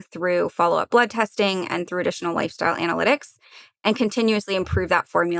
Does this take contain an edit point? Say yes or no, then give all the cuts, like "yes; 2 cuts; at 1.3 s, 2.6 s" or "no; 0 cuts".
no; 0 cuts